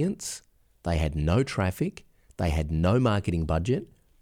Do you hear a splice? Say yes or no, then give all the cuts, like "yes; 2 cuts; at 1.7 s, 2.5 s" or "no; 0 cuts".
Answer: no; 0 cuts